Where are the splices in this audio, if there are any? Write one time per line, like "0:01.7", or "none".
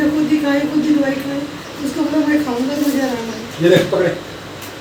none